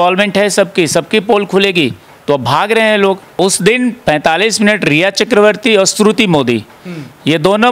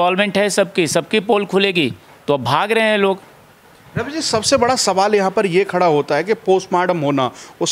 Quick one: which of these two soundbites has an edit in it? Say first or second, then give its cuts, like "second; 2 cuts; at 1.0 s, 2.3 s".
first; 1 cut; at 3.4 s